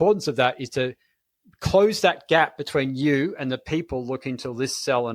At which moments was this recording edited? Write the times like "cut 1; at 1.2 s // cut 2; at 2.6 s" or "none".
none